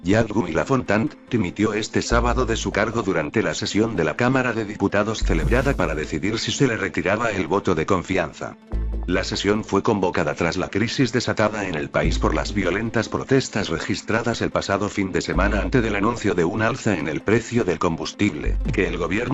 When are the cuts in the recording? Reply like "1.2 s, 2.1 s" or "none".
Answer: 17.5 s